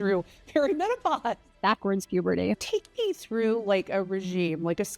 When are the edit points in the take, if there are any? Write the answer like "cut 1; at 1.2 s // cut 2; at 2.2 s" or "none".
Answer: cut 1; at 1.5 s // cut 2; at 2.6 s